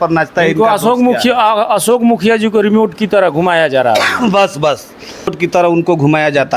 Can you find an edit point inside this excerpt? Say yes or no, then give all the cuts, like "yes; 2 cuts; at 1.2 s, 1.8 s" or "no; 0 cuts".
yes; 1 cut; at 5.3 s